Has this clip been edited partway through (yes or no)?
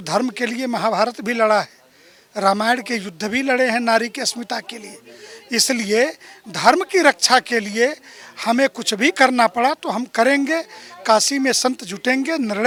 no